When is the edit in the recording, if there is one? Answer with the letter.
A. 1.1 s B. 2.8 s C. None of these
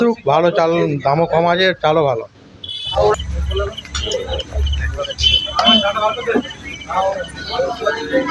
C